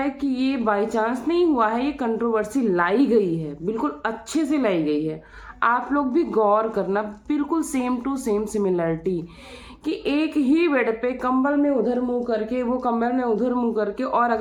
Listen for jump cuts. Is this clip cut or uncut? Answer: uncut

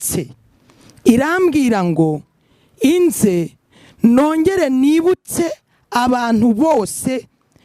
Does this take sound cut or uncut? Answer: uncut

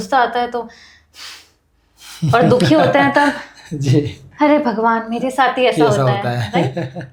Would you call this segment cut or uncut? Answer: uncut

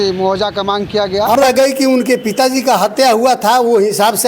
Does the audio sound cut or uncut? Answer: cut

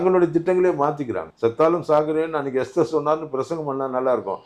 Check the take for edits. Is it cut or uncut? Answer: cut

